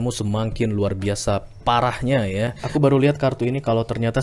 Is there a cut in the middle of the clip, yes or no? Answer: yes